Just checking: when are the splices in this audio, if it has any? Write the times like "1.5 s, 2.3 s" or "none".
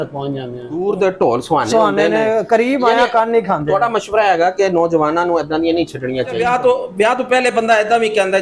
0.8 s, 2.3 s, 6.4 s